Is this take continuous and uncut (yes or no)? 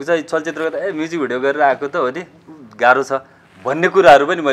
yes